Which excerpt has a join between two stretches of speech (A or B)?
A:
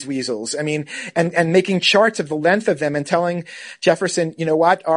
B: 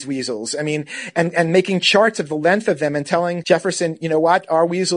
B